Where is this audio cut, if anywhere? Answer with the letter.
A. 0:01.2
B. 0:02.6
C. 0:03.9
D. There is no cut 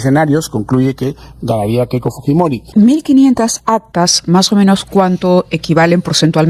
B